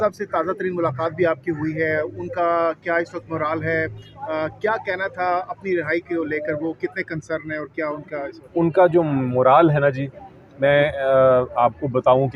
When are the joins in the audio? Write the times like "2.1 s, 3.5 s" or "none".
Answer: none